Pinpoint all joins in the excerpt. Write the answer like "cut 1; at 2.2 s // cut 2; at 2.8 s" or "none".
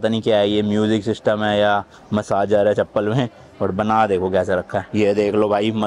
none